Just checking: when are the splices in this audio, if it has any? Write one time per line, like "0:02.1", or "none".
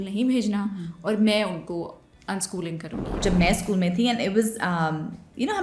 0:03.2